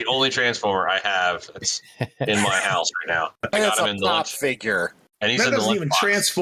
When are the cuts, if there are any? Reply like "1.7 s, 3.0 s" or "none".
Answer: 3.4 s